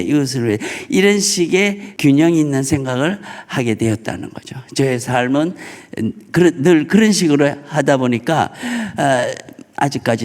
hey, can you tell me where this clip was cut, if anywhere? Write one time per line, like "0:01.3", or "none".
0:01.8